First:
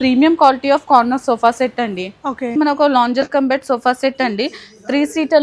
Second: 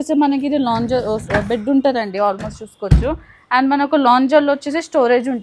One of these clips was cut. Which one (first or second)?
first